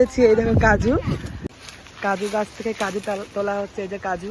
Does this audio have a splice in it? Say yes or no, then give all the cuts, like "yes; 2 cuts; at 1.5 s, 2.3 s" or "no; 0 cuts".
yes; 1 cut; at 1.6 s